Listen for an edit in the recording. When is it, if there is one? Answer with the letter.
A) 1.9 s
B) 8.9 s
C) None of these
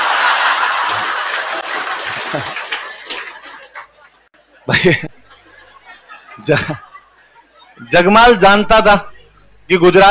C